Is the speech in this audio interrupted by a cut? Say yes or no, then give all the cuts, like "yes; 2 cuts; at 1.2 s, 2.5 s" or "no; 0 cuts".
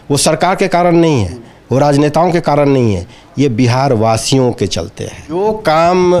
yes; 1 cut; at 5.3 s